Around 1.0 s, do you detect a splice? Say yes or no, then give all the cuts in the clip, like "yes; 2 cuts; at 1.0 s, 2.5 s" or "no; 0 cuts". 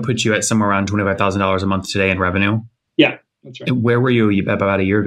no; 1 cut; at 2.8 s